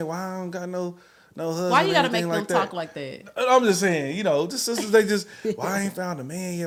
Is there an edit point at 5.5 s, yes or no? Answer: no